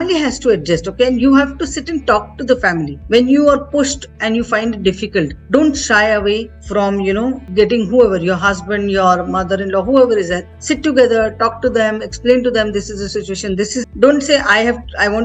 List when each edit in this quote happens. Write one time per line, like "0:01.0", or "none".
0:13.9